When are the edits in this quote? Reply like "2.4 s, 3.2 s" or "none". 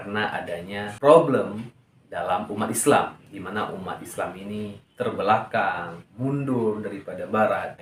none